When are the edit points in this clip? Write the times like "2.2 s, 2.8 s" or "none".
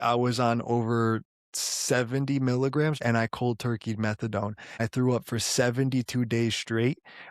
3.0 s, 4.8 s